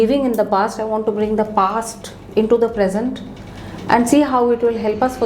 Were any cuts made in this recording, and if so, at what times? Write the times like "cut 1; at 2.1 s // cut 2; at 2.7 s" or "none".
none